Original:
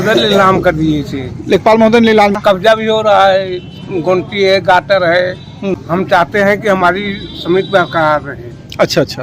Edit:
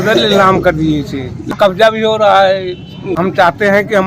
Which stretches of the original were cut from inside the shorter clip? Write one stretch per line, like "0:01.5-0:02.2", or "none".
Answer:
0:01.5-0:02.3
0:04.0-0:05.8